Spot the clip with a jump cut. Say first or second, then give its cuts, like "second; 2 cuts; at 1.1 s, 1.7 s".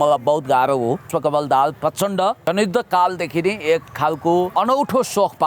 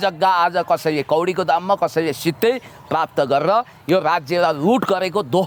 first; 3 cuts; at 1.1 s, 2.4 s, 4.5 s